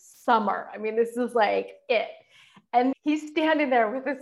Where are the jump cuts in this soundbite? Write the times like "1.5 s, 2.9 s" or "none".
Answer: 2.9 s

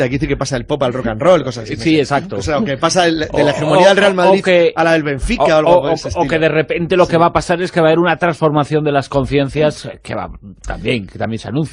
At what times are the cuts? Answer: none

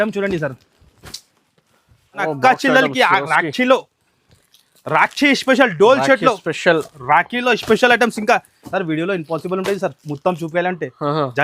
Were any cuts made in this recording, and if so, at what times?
2.2 s

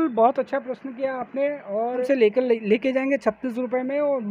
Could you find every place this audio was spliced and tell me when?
2.1 s

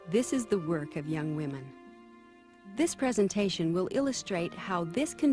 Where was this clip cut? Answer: 2.7 s

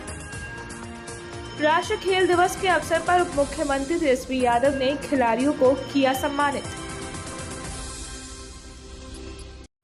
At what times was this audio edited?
0.9 s

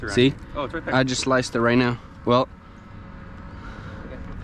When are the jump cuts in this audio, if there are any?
none

